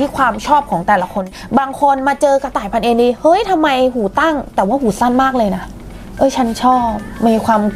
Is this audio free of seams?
no; 1 cut; at 1.2 s

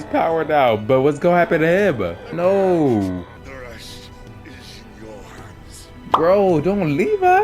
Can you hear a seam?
yes; 2 cuts; at 2.2 s, 3.4 s

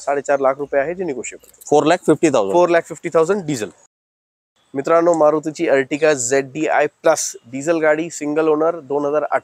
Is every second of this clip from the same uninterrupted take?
yes; 0 cuts

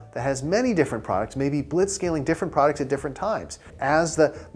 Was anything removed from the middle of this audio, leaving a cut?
no; 0 cuts

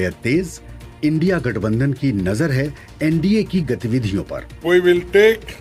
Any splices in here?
no; 0 cuts

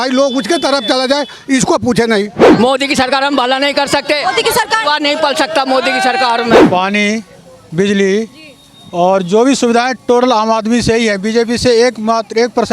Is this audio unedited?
no; 2 cuts; at 2.4 s, 6.6 s

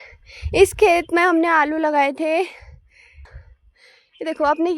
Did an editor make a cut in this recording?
yes; 1 cut; at 3.4 s

